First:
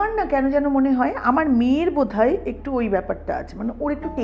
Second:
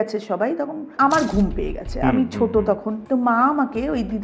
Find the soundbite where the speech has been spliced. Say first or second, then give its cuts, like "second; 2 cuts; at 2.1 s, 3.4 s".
second; 2 cuts; at 0.9 s, 2.9 s